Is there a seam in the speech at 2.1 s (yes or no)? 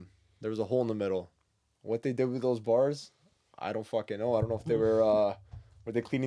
no